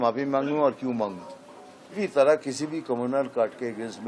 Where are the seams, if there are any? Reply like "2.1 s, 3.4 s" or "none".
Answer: 1.8 s